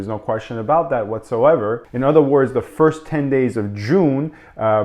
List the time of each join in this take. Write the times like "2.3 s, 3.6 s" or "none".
1.8 s